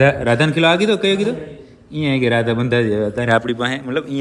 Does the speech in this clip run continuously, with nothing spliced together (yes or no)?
yes